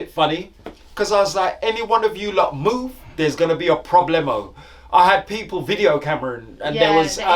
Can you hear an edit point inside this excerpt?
no; 0 cuts

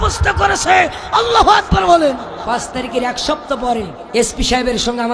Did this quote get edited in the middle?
yes; 2 cuts; at 2.4 s, 4.0 s

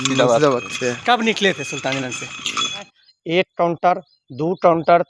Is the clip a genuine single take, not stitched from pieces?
no; 1 cut; at 2.9 s

